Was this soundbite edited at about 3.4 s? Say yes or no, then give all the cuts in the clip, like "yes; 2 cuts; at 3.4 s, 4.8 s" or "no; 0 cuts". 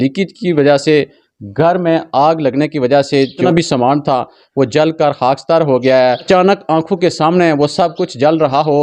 yes; 2 cuts; at 3.4 s, 6.3 s